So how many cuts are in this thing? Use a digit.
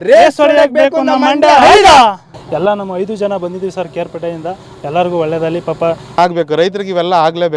1